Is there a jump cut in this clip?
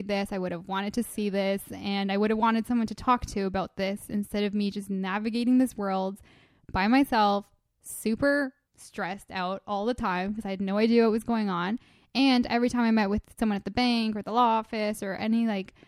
no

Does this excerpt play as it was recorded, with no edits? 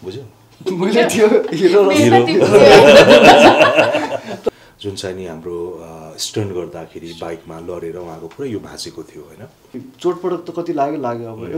no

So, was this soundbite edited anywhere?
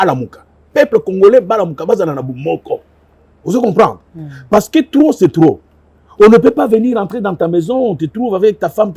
no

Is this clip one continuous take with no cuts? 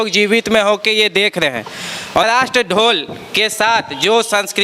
yes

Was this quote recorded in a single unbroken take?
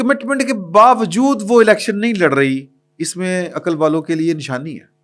yes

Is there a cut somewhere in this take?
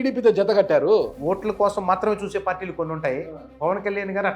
yes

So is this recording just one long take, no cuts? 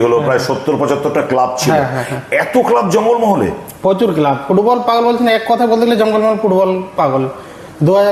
yes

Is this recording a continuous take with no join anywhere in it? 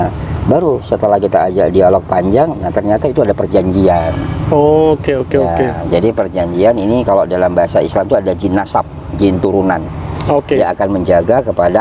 yes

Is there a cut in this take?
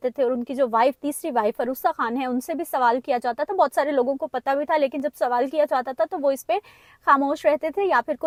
no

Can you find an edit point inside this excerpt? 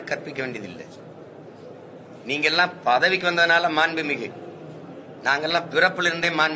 no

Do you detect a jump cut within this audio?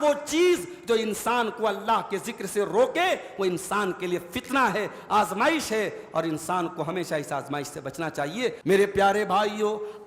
yes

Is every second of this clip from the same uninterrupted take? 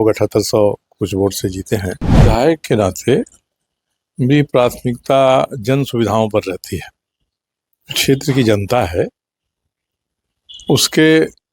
no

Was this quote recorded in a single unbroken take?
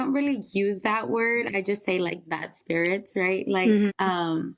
yes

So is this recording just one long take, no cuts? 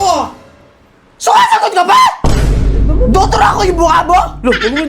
yes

